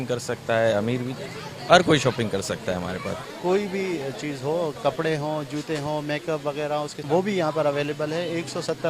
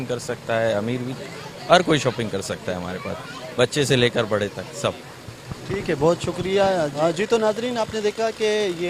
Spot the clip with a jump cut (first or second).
first